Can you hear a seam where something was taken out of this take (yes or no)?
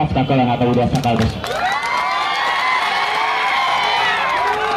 no